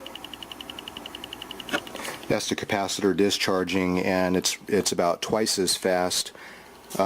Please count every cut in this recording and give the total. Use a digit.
1